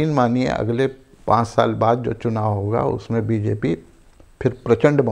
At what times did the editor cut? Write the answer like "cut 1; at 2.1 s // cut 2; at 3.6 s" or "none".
none